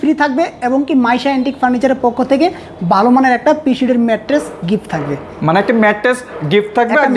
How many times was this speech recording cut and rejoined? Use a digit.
0